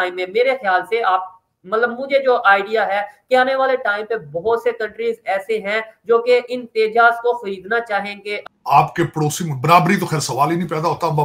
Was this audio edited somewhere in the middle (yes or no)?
yes